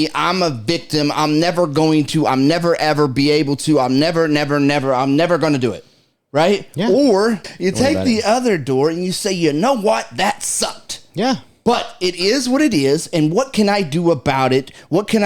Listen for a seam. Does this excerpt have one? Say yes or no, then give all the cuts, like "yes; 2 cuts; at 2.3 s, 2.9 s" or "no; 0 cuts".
yes; 1 cut; at 7.4 s